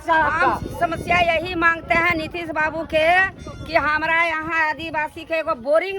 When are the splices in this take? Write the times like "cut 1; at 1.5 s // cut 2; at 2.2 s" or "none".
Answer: none